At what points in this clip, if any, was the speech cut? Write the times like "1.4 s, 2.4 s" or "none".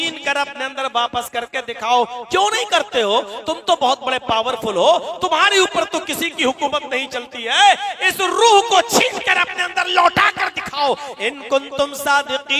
none